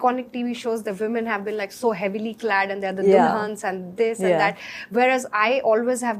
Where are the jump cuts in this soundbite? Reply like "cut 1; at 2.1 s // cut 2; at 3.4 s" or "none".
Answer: none